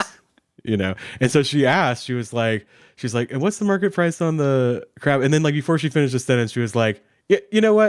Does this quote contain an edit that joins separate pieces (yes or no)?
no